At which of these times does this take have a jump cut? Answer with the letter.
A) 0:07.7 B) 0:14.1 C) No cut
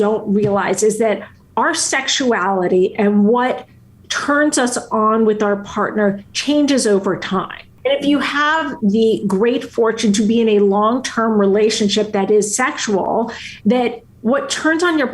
A